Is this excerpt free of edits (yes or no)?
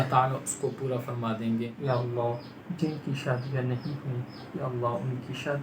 no